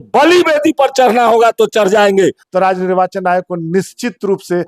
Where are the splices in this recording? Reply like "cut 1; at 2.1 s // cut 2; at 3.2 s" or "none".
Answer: cut 1; at 2.4 s